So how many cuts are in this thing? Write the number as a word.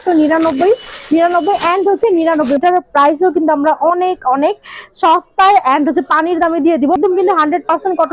two